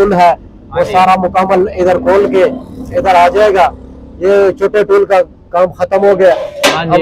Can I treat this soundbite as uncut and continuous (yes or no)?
yes